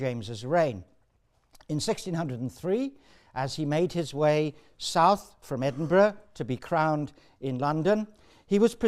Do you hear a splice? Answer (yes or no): yes